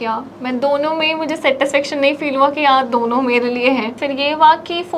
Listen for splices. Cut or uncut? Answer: uncut